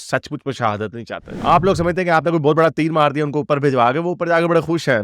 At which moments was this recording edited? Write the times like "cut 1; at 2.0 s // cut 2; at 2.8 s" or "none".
cut 1; at 1.3 s